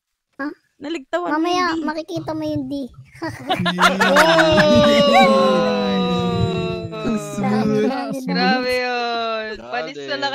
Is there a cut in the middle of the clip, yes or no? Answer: yes